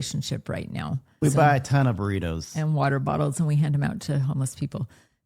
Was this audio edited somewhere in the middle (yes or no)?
yes